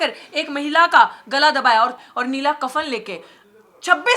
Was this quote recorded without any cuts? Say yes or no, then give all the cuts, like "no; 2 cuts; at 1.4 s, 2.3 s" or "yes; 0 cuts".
no; 1 cut; at 2.1 s